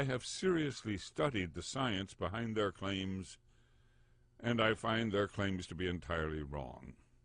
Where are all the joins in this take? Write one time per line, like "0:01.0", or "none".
0:01.3

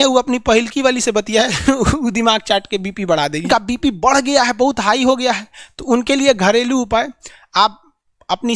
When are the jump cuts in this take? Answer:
0:03.5

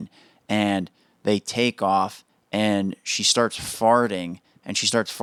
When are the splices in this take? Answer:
none

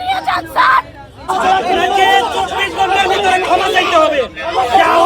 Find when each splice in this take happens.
0:01.3

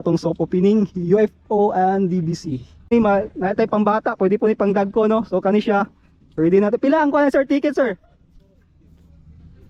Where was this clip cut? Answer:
0:02.9

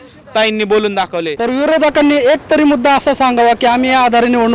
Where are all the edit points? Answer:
0:01.3

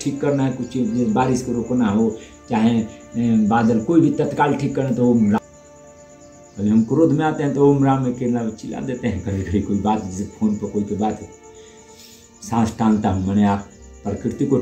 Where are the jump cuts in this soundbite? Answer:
none

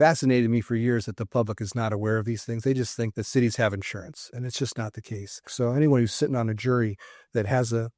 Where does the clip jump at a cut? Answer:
0:03.1
0:05.5

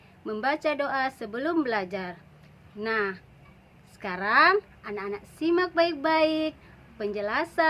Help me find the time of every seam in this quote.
none

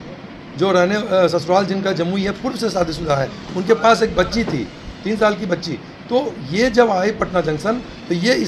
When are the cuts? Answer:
none

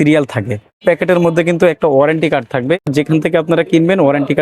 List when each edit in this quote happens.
0:00.8
0:02.8

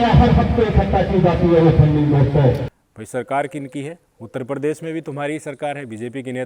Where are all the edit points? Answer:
none

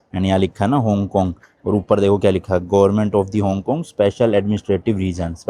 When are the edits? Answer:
none

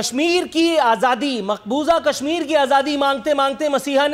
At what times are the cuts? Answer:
none

